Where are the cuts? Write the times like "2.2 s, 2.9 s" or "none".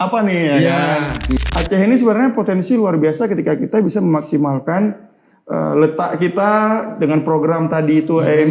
1.5 s